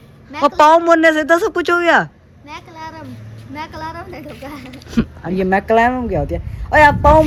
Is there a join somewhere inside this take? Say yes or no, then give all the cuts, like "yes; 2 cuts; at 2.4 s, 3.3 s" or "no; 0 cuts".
no; 0 cuts